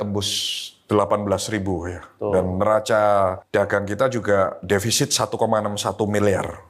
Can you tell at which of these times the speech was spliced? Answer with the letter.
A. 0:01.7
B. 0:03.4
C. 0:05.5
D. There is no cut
B